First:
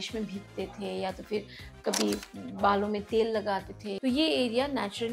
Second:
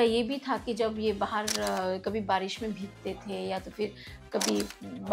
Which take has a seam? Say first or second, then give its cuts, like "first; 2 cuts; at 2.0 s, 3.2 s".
first; 1 cut; at 3.8 s